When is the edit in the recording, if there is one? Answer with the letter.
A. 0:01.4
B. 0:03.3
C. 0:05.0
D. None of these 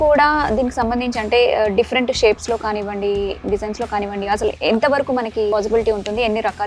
D